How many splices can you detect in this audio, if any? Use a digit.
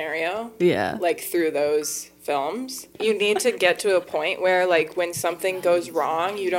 1